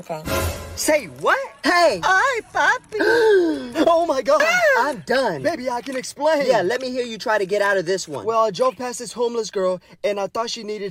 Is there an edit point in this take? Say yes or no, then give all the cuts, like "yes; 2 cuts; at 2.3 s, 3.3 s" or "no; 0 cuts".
no; 0 cuts